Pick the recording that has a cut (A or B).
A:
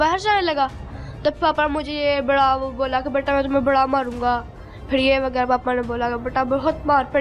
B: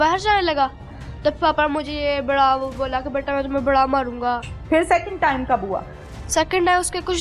B